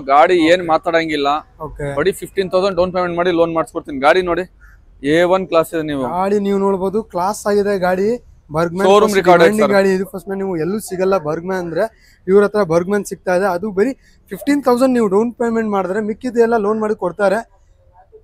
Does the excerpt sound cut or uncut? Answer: uncut